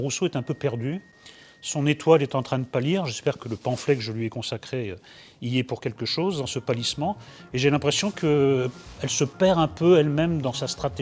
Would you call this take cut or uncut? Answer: uncut